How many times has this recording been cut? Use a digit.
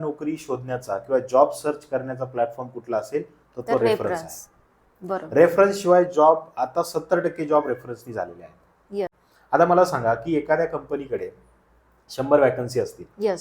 1